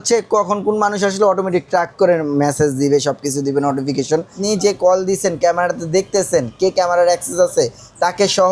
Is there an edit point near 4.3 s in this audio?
yes; 1 cut; at 4.3 s

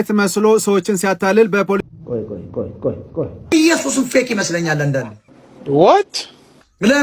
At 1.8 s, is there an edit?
yes; 1 cut; at 1.8 s

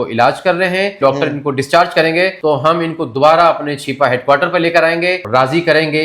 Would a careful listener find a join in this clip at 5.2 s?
yes; 3 cuts; at 1.0 s, 2.4 s, 5.2 s

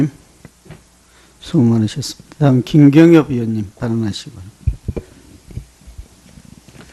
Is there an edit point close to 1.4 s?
yes; 1 cut; at 1.4 s

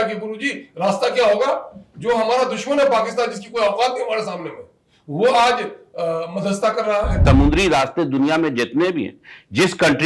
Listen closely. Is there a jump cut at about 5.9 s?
no; 1 cut; at 7.2 s

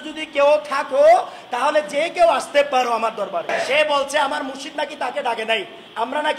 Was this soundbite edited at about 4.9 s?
no; 1 cut; at 3.5 s

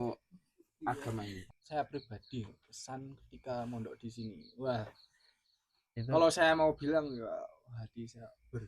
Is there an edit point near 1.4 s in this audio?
yes; 1 cut; at 1.4 s

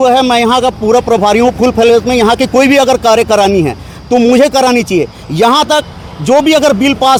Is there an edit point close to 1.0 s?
no; 0 cuts

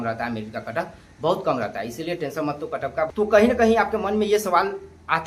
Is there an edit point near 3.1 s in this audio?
yes; 1 cut; at 3.1 s

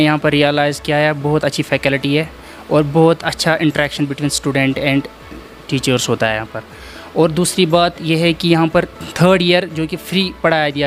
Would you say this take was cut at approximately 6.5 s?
no; 0 cuts

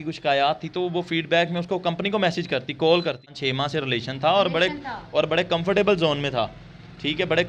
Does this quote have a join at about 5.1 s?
no; 1 cut; at 3.3 s

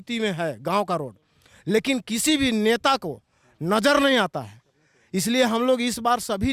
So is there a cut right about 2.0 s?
no; 0 cuts

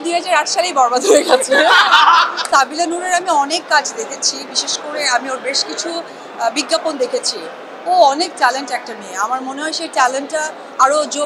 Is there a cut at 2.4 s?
yes; 1 cut; at 2.4 s

